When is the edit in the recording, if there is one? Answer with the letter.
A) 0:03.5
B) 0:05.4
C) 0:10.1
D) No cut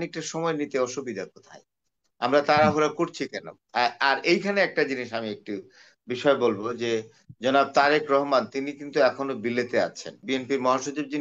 C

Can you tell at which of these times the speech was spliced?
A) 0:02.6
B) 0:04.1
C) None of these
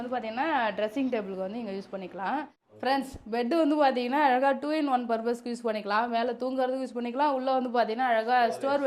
A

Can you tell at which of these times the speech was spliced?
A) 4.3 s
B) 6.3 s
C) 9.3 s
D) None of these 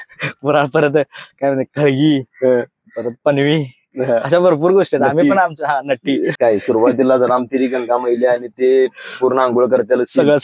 B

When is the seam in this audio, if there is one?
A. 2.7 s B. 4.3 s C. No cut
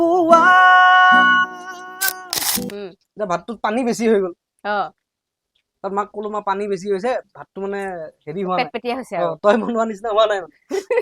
A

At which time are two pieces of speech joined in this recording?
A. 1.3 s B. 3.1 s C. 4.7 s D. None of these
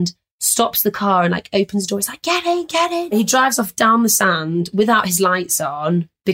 B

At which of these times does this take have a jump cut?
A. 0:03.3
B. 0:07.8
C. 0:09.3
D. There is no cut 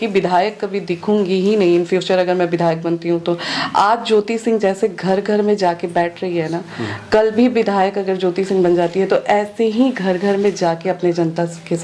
D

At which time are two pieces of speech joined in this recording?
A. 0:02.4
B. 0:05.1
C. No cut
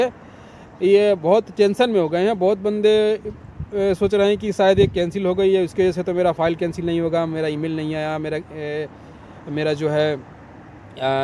C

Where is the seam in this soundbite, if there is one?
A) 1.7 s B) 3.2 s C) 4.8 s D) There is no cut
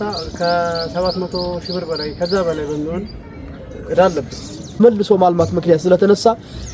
C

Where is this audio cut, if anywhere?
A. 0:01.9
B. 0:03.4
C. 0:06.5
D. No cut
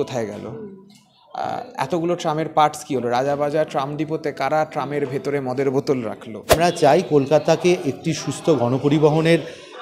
C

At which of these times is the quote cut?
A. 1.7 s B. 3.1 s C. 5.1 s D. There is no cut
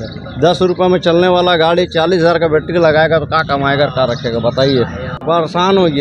C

